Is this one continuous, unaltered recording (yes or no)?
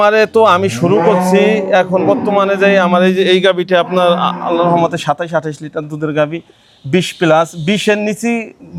yes